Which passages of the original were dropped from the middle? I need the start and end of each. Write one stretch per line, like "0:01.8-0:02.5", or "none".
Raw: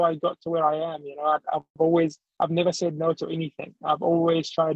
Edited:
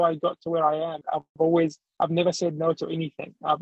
0:01.0-0:01.4